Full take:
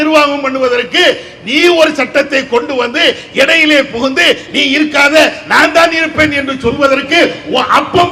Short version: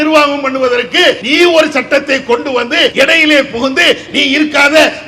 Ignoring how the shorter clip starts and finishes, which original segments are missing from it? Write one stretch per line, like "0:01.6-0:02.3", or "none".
0:01.2-0:01.5
0:03.2-0:03.3